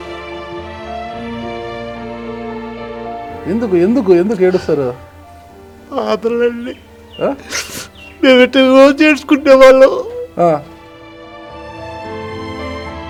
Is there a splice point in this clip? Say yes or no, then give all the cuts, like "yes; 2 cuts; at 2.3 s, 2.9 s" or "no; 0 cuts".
no; 0 cuts